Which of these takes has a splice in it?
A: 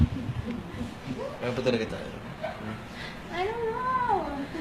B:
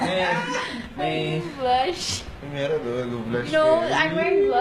A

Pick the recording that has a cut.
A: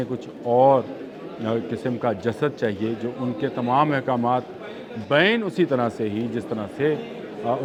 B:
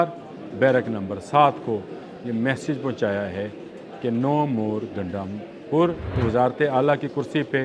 B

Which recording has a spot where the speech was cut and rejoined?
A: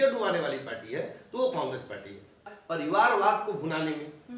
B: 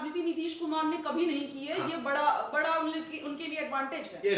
A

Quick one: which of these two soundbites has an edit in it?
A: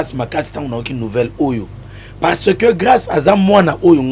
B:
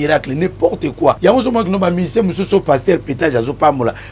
B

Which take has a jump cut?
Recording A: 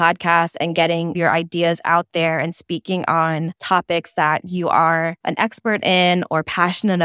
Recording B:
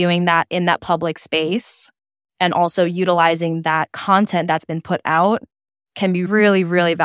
A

